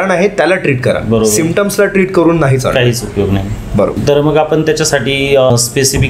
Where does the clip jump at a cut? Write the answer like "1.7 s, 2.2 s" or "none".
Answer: none